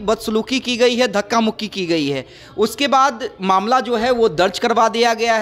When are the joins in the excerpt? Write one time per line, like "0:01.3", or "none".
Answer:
none